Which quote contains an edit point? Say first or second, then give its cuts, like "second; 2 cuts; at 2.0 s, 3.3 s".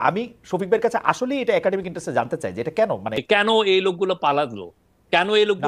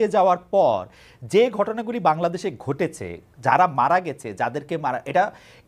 first; 1 cut; at 3.1 s